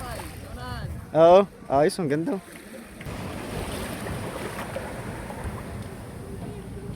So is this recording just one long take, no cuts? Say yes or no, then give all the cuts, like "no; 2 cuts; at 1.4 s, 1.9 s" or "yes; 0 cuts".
no; 1 cut; at 3.1 s